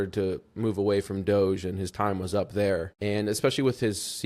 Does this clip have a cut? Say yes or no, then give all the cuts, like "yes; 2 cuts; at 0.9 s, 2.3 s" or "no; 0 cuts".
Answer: yes; 1 cut; at 2.9 s